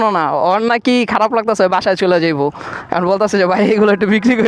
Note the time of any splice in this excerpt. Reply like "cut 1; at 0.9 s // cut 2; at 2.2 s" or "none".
none